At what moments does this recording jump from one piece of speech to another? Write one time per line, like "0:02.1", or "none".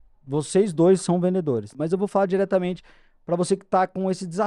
0:01.7